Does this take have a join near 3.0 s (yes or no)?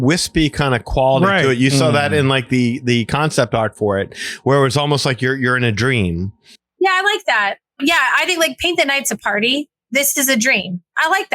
no